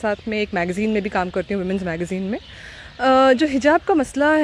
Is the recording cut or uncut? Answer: uncut